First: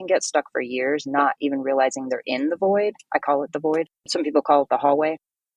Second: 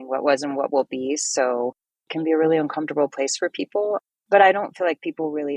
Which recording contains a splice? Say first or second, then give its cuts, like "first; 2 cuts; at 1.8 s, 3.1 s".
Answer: second; 1 cut; at 4.0 s